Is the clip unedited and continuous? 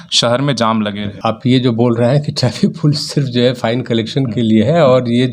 no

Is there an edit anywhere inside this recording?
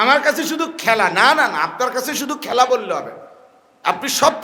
no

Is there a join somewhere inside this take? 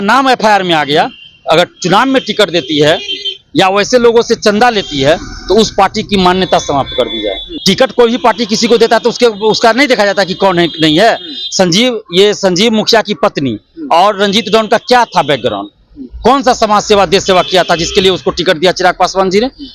yes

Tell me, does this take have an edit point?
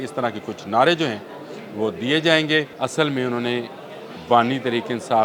yes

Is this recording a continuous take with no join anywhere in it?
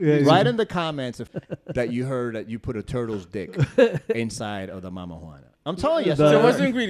no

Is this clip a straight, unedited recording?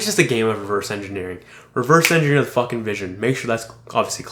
yes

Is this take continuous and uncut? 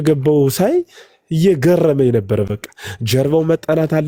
yes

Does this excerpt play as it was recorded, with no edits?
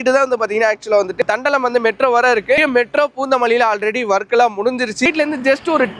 no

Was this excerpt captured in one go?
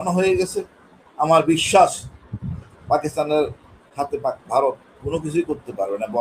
yes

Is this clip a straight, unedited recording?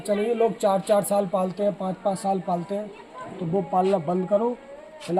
yes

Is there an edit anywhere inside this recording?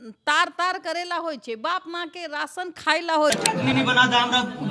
yes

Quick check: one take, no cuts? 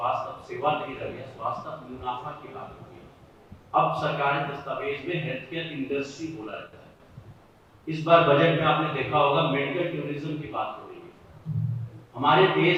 yes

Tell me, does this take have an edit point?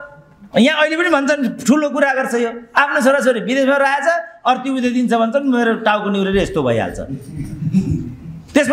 no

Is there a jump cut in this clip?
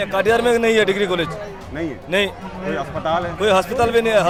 no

